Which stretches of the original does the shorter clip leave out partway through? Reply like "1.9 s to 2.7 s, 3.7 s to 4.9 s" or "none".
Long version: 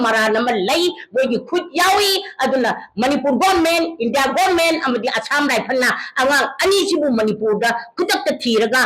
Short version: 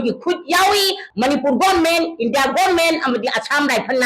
2.3 s to 2.8 s